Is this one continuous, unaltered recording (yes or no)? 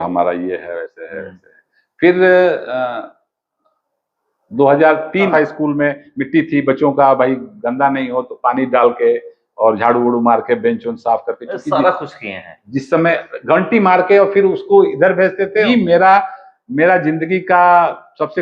no